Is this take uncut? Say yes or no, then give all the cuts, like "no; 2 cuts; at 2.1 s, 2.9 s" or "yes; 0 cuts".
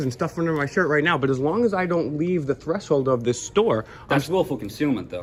yes; 0 cuts